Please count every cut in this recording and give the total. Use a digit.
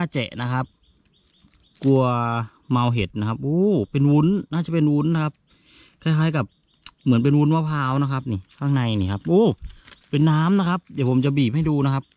0